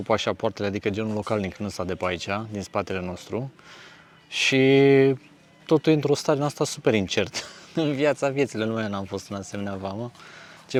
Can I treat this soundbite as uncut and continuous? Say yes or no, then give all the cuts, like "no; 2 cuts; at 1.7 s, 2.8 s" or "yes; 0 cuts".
yes; 0 cuts